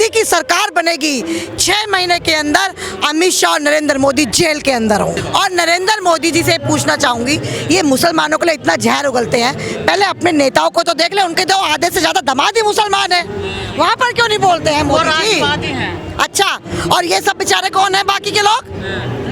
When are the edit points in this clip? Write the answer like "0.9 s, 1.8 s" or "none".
5.2 s

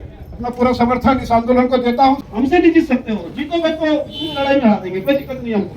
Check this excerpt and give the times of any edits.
2.3 s

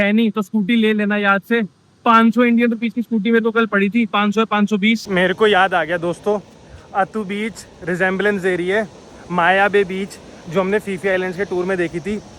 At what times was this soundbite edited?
5.1 s

